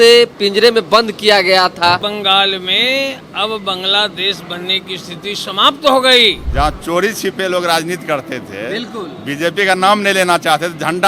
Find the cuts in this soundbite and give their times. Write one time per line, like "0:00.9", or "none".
0:02.0
0:06.4